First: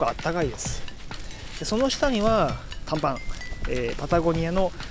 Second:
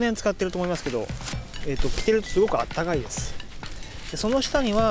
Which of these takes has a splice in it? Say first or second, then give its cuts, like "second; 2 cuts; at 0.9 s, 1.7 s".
second; 1 cut; at 1.4 s